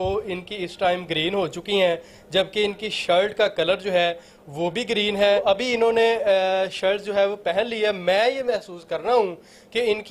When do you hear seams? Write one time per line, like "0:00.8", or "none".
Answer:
0:05.4